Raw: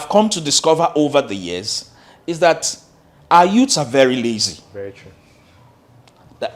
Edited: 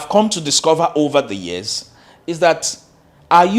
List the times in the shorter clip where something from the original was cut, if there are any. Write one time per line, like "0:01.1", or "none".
none